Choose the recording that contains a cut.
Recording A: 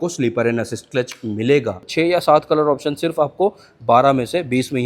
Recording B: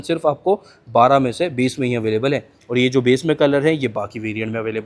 A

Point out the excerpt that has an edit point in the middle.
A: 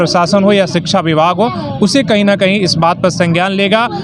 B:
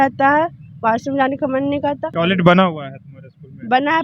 B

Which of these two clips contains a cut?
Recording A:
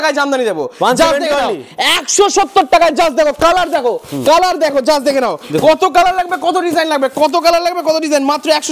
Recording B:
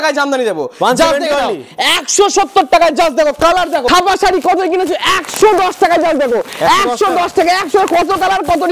B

